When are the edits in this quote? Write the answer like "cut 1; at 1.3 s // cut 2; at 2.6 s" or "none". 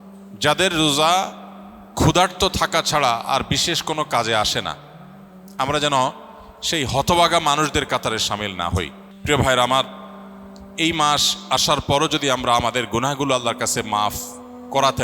cut 1; at 9.1 s